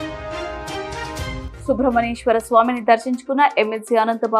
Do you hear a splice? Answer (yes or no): yes